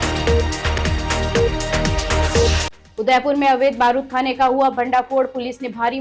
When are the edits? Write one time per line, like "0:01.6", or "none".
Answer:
0:02.6